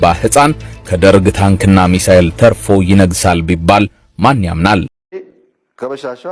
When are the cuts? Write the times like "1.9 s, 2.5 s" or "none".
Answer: 5.1 s